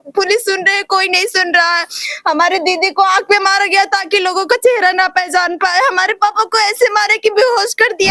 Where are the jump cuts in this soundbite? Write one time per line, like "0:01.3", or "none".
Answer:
none